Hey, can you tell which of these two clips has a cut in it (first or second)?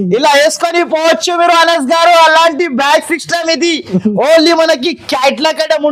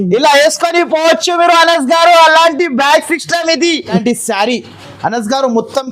second